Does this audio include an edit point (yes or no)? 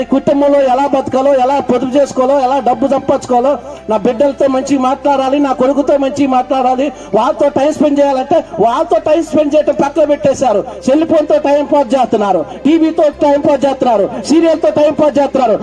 no